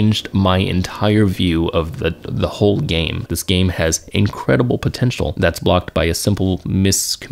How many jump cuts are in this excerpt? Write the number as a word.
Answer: two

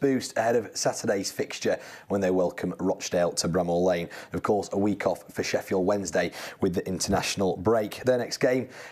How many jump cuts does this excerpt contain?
zero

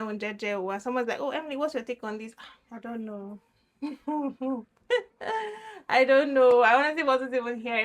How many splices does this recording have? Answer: zero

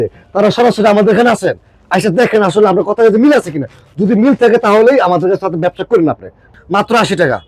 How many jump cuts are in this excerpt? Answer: one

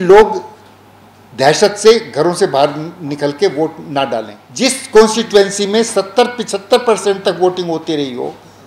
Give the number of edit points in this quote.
one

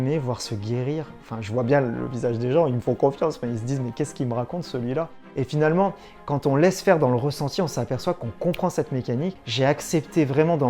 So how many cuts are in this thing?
two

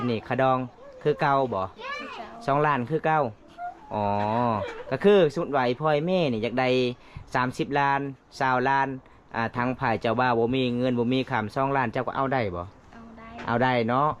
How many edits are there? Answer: zero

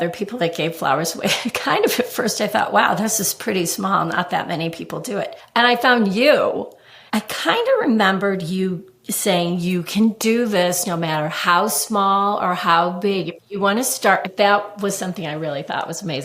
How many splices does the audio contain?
three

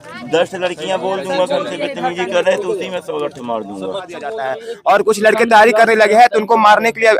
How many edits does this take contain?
one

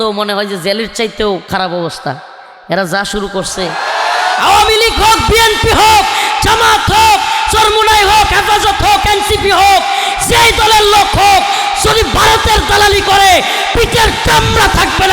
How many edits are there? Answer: one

